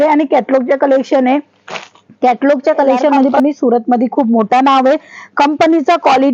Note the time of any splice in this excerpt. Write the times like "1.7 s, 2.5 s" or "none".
3.3 s